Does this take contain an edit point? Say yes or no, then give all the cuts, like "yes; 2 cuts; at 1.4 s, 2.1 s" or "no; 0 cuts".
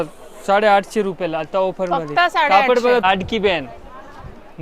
yes; 1 cut; at 3.0 s